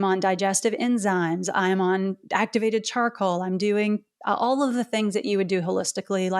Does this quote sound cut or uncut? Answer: uncut